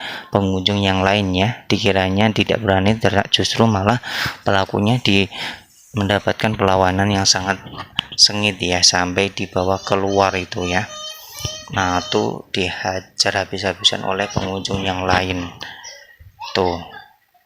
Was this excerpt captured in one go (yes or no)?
yes